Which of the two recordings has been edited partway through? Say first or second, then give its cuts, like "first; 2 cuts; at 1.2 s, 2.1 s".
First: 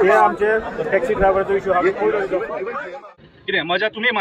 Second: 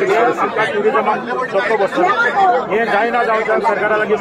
first; 1 cut; at 2.9 s